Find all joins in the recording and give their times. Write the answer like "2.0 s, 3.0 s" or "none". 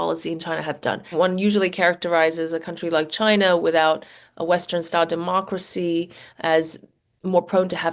1.1 s